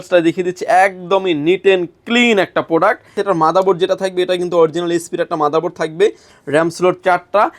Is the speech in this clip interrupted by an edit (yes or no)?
yes